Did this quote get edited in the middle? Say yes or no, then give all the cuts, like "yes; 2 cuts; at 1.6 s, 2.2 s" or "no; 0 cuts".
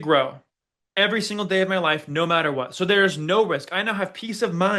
no; 0 cuts